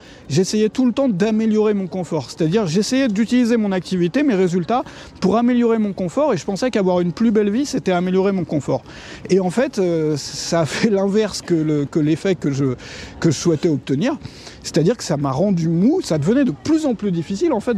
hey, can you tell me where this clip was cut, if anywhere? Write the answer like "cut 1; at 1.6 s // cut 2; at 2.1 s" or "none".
cut 1; at 16.0 s